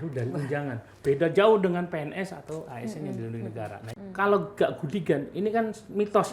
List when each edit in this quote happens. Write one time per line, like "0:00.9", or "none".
0:03.9